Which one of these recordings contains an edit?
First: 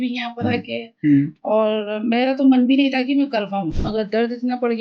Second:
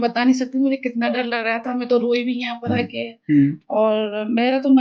first; 1 cut; at 3.8 s

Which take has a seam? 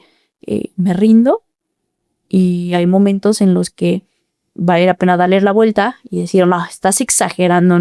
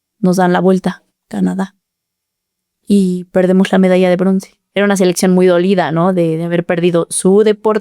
second; 1 cut; at 4.6 s

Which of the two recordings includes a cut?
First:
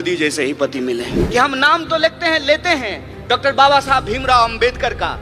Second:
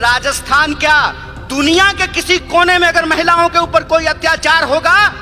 first; 1 cut; at 1.2 s

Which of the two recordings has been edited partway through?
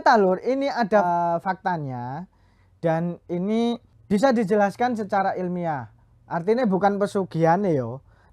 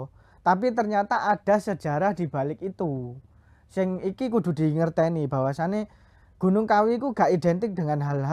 first; 2 cuts; at 1.0 s, 3.9 s

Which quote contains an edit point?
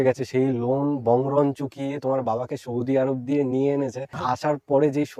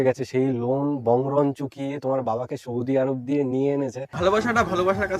second; 1 cut; at 4.0 s

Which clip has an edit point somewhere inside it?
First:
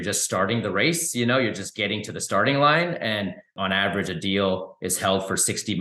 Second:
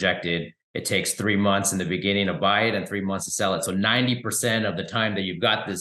first; 1 cut; at 3.5 s

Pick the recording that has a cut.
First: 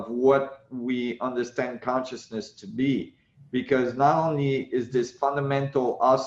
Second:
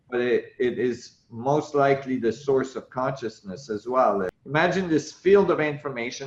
second; 1 cut; at 4.4 s

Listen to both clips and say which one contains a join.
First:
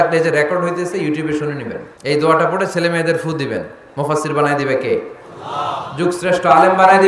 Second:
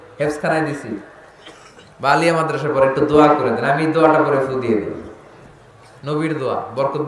first; 1 cut; at 1.9 s

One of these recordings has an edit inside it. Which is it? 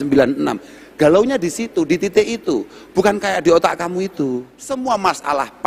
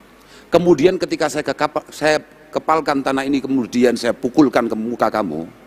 first; 1 cut; at 4.6 s

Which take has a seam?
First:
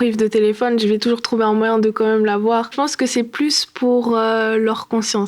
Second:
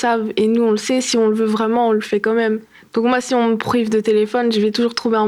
first; 1 cut; at 2.7 s

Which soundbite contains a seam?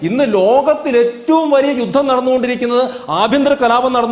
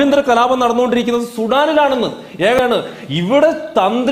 second; 1 cut; at 2.6 s

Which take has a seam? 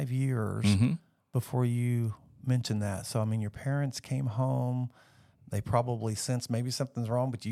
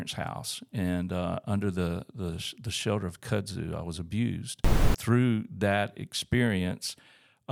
second; 1 cut; at 4.9 s

